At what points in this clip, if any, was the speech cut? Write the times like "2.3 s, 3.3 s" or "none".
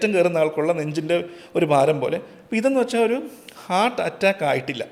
none